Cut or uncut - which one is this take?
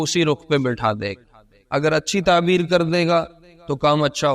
uncut